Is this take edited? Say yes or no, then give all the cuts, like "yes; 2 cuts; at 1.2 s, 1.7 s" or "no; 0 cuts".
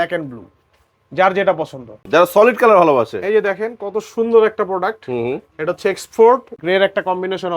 yes; 2 cuts; at 2.0 s, 6.5 s